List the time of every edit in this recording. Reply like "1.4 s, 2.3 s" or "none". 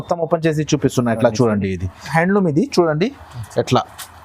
2.1 s